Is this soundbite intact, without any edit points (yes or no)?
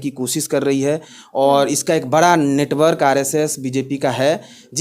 yes